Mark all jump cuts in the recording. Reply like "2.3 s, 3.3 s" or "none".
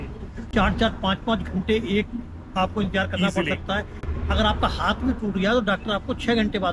none